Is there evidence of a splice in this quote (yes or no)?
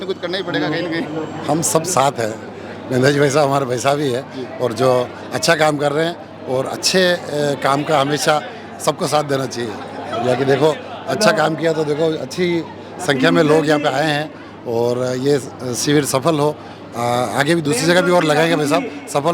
no